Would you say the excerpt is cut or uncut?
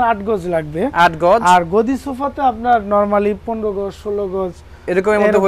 uncut